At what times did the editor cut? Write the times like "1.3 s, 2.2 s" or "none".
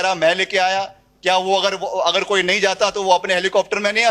none